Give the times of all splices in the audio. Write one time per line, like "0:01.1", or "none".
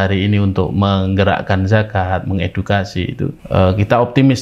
0:03.4